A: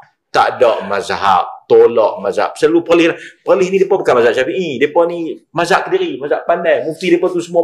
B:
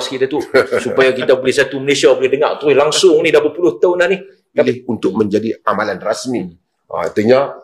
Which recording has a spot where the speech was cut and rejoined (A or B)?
B